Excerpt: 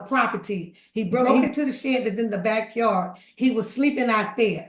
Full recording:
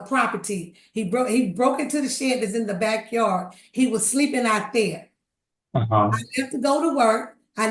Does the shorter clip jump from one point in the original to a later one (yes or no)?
yes